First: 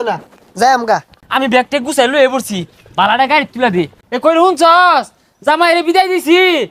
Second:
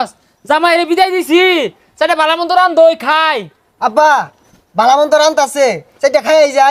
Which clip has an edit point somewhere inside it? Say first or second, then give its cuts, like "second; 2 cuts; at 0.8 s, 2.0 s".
first; 2 cuts; at 1.1 s, 4.0 s